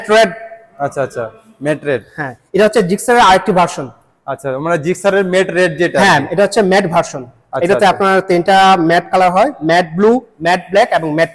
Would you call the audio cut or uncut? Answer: uncut